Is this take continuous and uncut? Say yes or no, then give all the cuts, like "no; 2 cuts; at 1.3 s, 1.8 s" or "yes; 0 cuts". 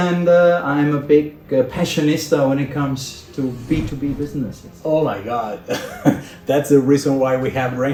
yes; 0 cuts